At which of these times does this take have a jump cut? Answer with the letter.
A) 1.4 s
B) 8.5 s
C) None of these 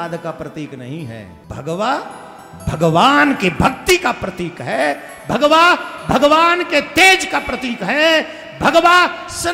A